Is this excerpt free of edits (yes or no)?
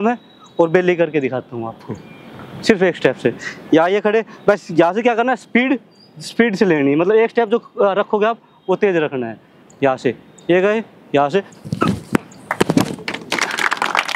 yes